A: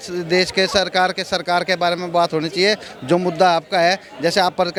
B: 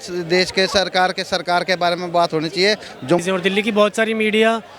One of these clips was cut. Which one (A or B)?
B